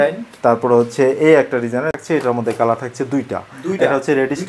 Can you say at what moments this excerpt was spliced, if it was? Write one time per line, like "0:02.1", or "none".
0:01.9